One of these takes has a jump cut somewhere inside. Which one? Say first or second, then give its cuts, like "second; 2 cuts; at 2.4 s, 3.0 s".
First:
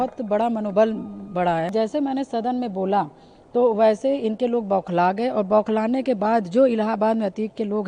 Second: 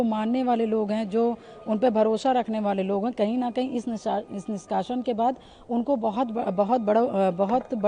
first; 1 cut; at 1.7 s